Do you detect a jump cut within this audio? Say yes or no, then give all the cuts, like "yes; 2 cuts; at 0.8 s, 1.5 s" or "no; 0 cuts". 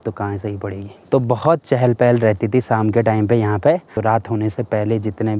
yes; 2 cuts; at 0.9 s, 3.9 s